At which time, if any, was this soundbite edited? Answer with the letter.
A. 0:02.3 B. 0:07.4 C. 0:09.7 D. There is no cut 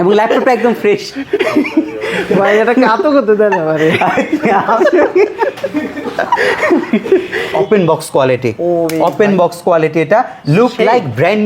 B